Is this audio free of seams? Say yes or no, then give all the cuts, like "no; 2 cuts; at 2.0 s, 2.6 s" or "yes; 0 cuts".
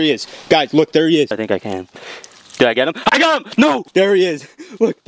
no; 2 cuts; at 1.3 s, 3.8 s